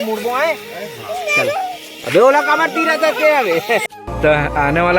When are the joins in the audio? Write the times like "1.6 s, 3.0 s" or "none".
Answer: 3.8 s